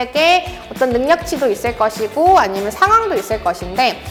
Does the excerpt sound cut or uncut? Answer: uncut